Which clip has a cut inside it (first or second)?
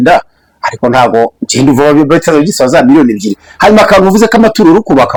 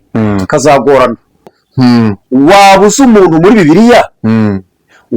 second